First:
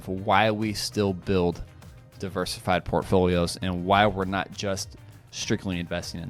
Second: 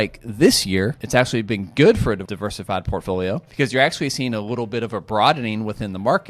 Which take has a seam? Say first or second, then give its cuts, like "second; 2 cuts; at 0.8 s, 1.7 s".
second; 3 cuts; at 1.0 s, 2.2 s, 3.5 s